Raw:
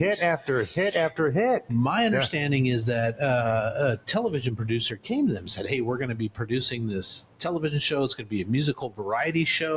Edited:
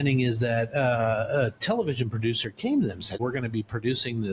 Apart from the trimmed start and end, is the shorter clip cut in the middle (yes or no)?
yes